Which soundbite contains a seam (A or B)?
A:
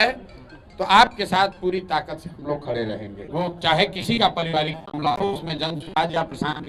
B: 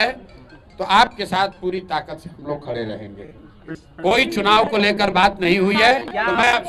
A